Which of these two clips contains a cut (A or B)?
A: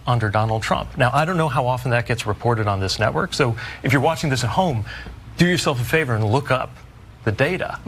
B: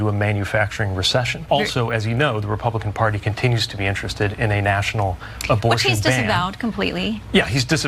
B